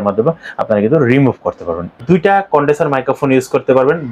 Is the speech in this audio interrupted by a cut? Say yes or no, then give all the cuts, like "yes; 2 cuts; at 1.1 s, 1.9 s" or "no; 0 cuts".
yes; 1 cut; at 1.9 s